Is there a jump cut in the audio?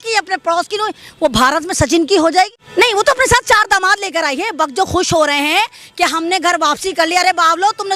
yes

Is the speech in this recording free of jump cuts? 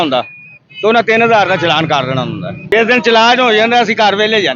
no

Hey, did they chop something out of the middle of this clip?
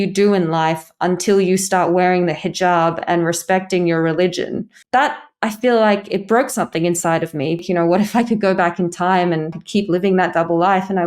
yes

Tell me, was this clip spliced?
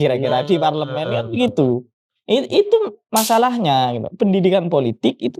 no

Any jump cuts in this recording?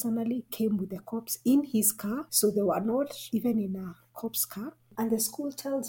yes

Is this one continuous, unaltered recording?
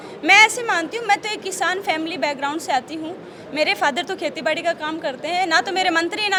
yes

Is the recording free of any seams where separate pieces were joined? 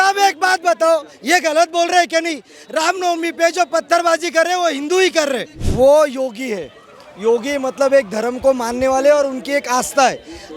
no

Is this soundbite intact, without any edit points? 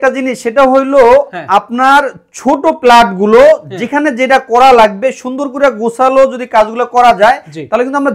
yes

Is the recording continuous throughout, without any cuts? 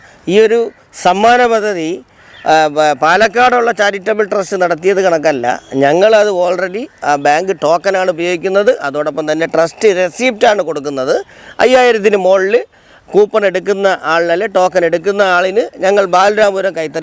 yes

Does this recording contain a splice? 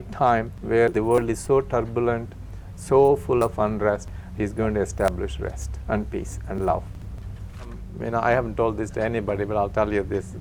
yes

